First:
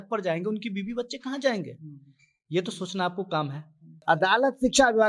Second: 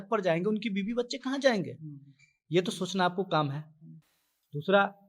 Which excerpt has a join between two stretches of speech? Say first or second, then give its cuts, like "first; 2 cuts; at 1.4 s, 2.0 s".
first; 1 cut; at 4.0 s